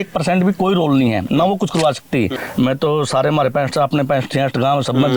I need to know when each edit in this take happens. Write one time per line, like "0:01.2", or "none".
0:02.4